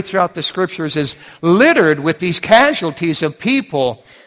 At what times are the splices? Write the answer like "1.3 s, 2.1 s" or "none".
none